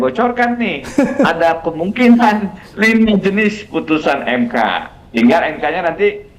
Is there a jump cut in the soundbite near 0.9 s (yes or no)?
no